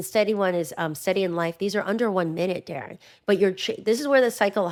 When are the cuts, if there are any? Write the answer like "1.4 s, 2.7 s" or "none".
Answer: none